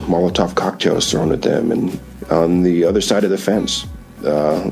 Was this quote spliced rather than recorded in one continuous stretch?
yes; 1 cut; at 2.0 s

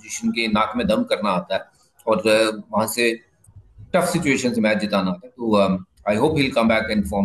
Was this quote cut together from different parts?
no; 0 cuts

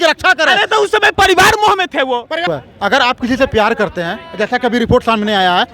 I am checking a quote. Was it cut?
yes; 1 cut; at 2.4 s

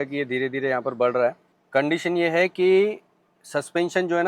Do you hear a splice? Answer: yes; 1 cut; at 1.6 s

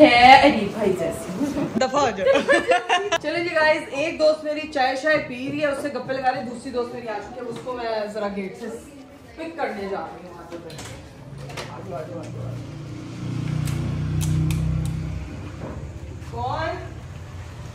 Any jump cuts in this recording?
no; 0 cuts

